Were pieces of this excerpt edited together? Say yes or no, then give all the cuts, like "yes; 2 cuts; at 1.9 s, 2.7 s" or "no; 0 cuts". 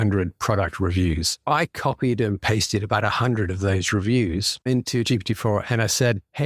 yes; 1 cut; at 4.7 s